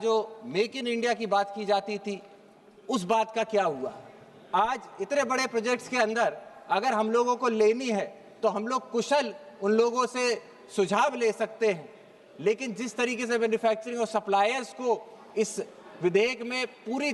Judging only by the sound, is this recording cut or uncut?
uncut